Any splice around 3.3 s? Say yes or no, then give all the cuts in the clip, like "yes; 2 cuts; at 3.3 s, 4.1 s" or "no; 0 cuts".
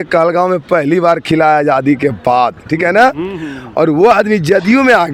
no; 0 cuts